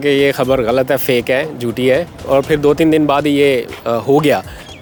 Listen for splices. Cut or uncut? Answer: uncut